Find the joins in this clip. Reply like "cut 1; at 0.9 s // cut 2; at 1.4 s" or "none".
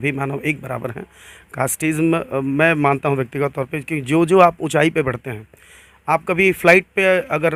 none